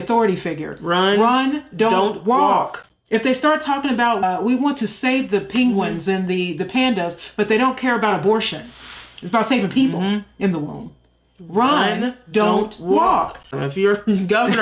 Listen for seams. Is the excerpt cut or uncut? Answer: cut